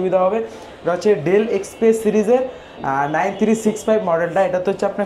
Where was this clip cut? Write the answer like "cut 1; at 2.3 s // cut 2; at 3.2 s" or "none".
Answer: none